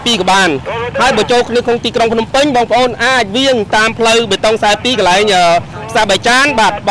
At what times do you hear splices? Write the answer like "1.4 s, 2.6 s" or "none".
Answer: none